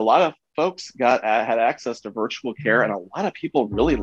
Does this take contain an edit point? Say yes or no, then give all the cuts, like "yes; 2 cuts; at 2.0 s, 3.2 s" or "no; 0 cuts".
no; 0 cuts